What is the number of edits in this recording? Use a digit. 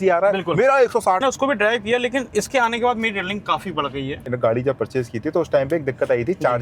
2